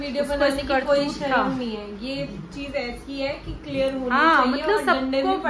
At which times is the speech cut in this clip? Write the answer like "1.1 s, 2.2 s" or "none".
none

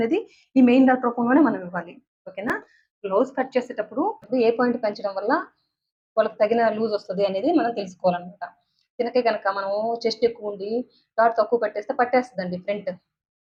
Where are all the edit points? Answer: none

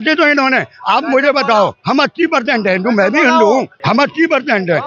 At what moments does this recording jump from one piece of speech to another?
3.7 s

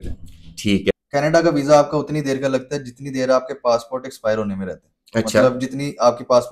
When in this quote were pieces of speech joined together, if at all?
0.9 s

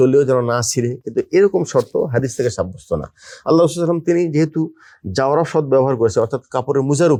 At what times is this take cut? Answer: none

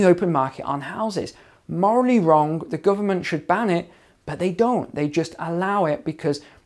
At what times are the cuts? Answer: none

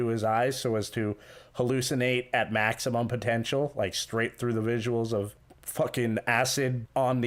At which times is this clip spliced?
none

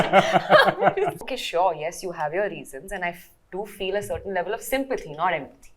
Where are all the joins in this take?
1.3 s

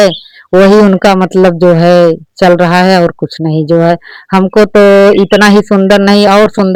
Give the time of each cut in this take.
none

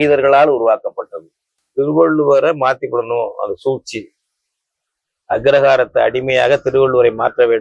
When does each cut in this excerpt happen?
1.6 s

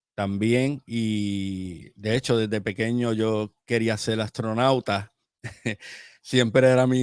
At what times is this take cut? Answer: none

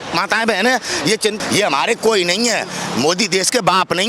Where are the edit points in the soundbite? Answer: 1.4 s

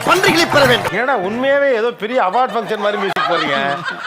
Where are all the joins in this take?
0.9 s

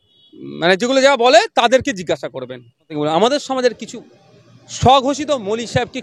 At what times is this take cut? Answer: 2.9 s

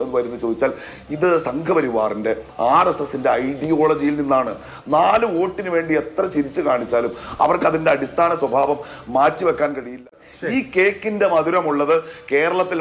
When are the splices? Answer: 10.0 s

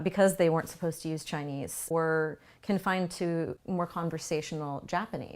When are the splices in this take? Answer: 1.9 s, 3.6 s

